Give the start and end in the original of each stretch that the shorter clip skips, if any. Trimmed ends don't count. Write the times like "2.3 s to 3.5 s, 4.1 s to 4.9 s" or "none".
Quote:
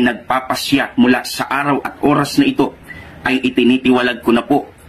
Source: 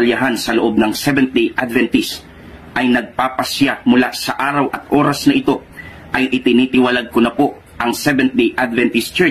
none